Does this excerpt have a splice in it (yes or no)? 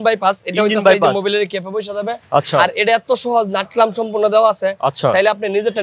no